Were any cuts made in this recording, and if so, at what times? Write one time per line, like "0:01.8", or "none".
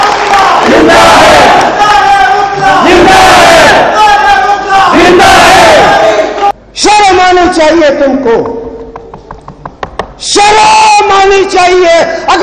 0:06.5